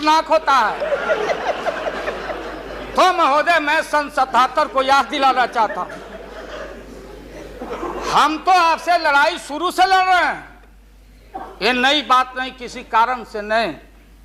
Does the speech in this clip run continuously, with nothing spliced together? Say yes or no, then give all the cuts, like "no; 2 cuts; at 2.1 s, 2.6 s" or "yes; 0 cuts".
yes; 0 cuts